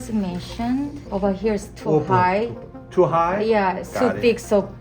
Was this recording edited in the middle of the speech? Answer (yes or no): yes